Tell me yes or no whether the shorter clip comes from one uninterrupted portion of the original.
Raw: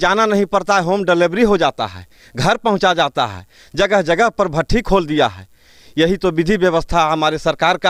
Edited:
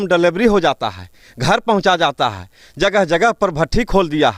yes